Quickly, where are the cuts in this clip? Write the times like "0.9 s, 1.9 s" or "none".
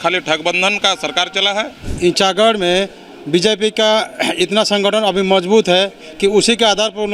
1.8 s